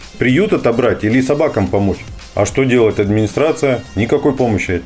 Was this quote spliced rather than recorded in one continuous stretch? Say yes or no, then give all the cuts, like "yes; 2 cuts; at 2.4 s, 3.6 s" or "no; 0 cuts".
yes; 1 cut; at 3.9 s